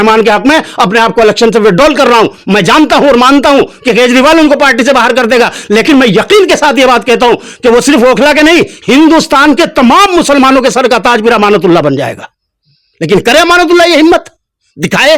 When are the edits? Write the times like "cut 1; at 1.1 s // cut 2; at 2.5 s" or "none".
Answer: none

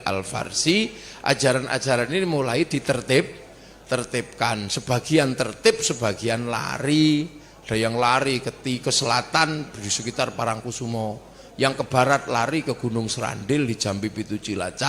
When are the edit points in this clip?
none

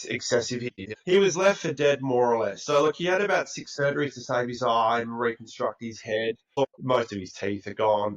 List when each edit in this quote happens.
cut 1; at 0.9 s // cut 2; at 6.6 s

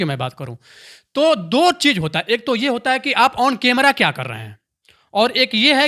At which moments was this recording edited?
none

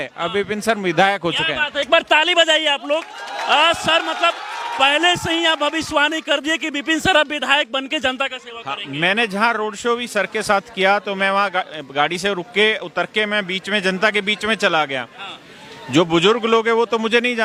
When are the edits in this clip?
none

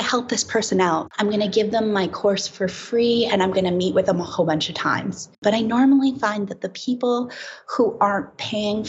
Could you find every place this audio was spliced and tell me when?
cut 1; at 1.1 s // cut 2; at 5.4 s

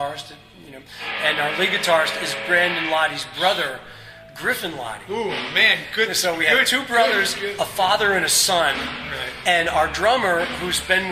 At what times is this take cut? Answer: none

